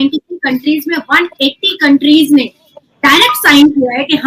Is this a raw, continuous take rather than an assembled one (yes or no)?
yes